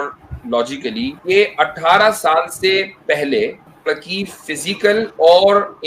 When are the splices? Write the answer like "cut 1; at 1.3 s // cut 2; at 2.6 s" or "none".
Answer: cut 1; at 1.2 s // cut 2; at 3.7 s